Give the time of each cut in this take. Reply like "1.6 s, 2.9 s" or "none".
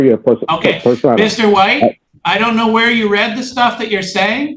2.1 s

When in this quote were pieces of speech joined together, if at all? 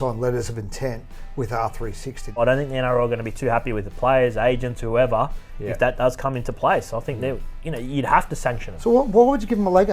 2.4 s, 8.7 s

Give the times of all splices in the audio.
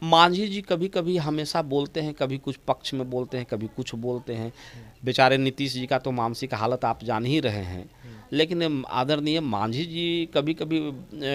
none

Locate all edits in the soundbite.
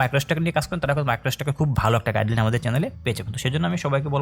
3.0 s

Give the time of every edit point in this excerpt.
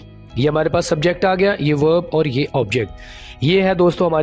none

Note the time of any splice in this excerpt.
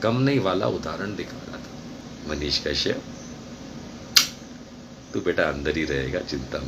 2.1 s

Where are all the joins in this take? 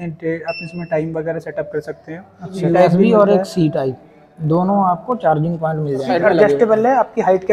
2.6 s, 6.1 s

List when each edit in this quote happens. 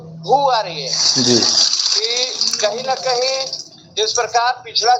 none

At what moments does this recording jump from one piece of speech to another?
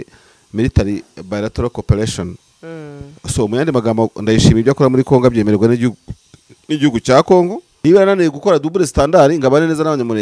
7.6 s

